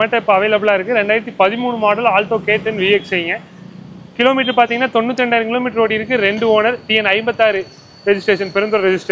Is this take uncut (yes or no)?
yes